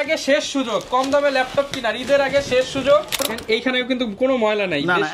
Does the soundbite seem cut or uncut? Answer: cut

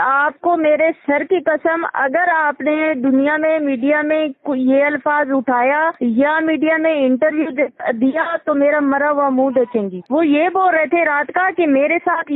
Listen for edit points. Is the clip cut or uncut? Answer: cut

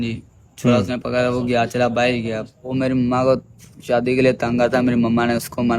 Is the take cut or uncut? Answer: cut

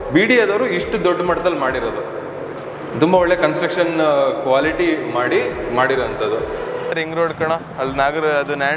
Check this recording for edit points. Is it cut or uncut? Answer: cut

